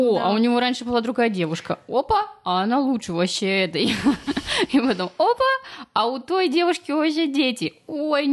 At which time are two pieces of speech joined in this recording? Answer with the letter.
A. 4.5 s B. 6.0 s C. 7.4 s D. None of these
D